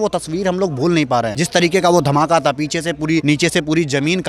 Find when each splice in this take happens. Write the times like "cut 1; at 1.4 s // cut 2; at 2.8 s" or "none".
cut 1; at 1.4 s // cut 2; at 3.2 s

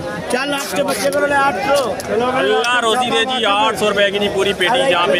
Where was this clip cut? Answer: none

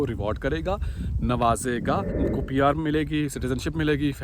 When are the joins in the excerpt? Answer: cut 1; at 2.2 s

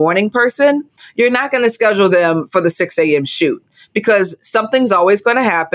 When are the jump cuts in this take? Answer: none

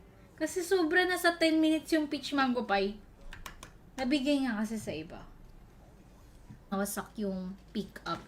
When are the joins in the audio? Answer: cut 1; at 6.7 s

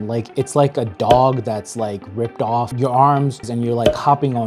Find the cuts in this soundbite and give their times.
cut 1; at 2.7 s // cut 2; at 3.5 s

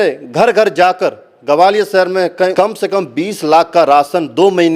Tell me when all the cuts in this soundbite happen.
cut 1; at 2.5 s

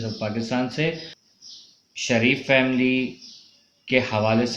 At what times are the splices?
cut 1; at 1.1 s

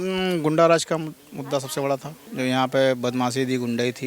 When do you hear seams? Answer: cut 1; at 2.2 s

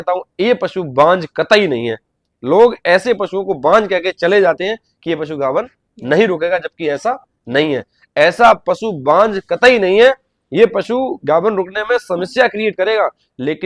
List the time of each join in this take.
none

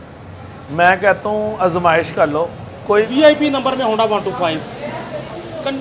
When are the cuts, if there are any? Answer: cut 1; at 3.1 s

